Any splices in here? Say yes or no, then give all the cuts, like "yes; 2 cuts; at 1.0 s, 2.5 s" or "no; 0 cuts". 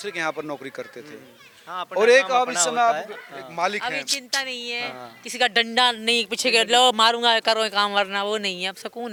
no; 0 cuts